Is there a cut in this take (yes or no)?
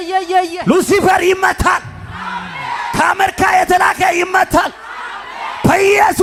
no